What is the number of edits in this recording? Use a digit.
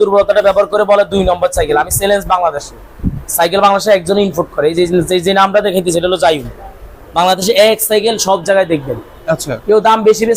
0